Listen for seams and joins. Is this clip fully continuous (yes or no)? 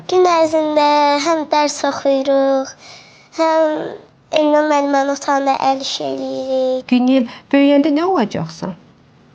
no